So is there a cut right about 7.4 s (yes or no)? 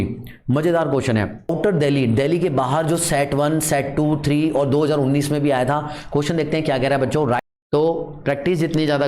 yes